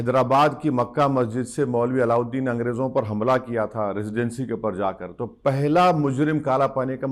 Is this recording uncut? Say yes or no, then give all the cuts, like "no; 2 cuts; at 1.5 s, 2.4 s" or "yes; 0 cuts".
yes; 0 cuts